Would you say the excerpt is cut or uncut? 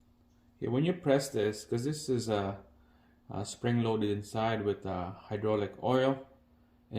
uncut